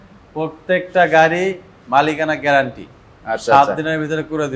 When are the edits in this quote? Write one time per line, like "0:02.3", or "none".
none